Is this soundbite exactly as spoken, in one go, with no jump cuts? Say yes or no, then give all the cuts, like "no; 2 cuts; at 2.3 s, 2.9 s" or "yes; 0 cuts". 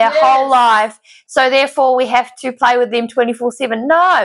yes; 0 cuts